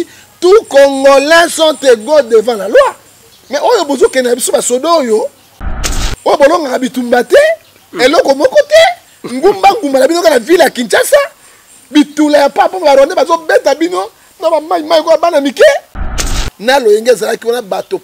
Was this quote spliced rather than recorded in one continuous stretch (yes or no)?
yes